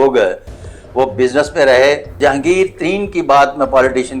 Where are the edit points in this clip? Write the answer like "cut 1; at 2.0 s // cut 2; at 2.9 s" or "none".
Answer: cut 1; at 2.2 s